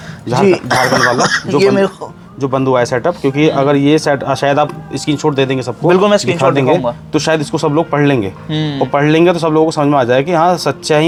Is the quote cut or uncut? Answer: uncut